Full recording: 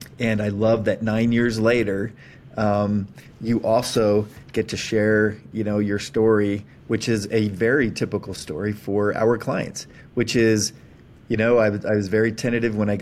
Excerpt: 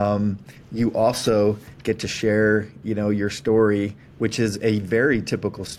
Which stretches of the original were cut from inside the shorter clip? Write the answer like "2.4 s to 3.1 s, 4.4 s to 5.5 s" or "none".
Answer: none